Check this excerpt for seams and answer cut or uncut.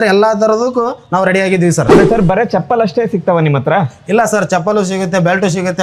cut